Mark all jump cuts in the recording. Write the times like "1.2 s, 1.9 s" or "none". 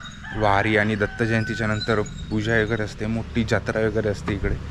none